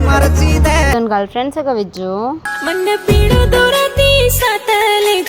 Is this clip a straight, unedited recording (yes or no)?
no